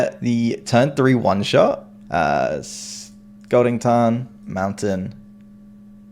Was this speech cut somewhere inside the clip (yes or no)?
yes